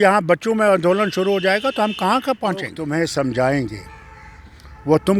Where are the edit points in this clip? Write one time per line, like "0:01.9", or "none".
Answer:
0:02.8